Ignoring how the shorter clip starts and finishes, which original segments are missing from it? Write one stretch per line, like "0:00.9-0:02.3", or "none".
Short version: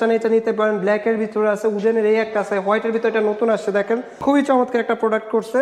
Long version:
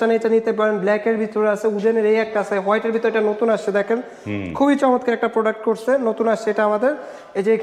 0:04.1-0:04.4